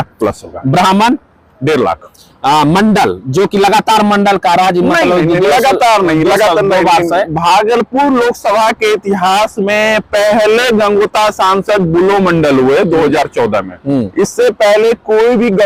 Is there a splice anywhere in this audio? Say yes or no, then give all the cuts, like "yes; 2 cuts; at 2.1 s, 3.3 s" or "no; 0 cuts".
no; 0 cuts